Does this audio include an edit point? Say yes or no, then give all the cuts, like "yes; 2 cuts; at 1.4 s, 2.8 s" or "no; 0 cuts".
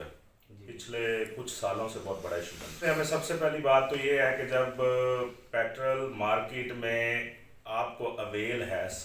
yes; 1 cut; at 2.8 s